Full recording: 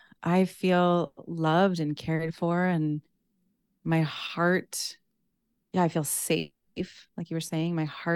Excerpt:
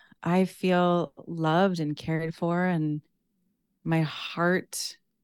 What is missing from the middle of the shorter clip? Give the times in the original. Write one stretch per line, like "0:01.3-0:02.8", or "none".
none